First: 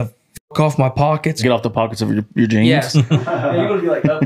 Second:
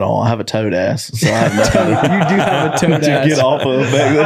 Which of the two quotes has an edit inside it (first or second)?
first